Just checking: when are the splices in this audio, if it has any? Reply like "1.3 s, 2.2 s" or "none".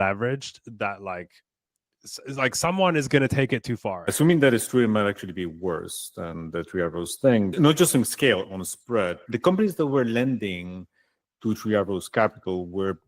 4.1 s, 7.5 s, 9.3 s